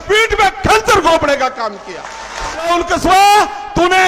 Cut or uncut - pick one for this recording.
cut